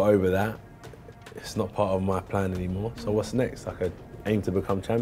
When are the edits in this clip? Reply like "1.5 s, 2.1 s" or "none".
none